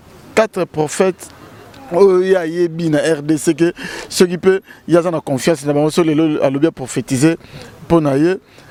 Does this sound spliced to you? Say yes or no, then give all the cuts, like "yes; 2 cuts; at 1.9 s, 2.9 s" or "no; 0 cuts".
no; 0 cuts